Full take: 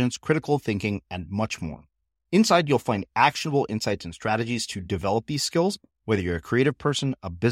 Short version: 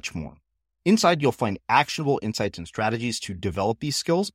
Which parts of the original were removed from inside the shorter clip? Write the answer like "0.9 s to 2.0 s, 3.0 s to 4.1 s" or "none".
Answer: none